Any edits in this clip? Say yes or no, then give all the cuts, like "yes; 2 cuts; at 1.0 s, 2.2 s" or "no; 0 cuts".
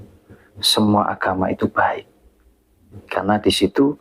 no; 0 cuts